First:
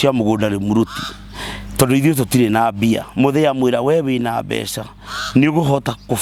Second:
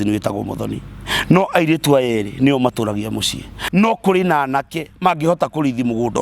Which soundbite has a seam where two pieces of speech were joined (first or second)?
second